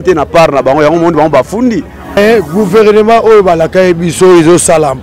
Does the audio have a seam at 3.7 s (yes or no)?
no